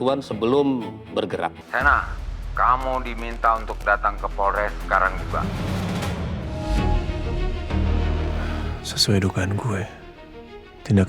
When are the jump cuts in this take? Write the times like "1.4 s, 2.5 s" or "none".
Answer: 1.6 s